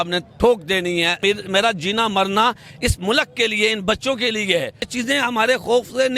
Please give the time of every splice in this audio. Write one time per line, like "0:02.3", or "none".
0:01.2
0:04.9